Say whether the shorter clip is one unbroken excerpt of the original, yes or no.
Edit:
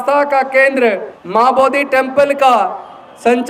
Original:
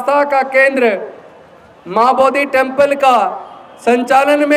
no